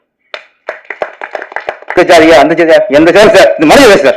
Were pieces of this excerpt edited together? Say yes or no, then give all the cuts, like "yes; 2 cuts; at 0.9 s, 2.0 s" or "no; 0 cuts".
yes; 1 cut; at 2.0 s